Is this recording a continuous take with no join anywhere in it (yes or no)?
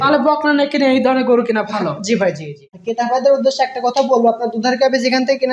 no